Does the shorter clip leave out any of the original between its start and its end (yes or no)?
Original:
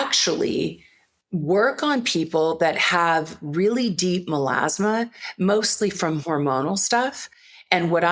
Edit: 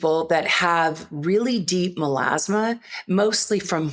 no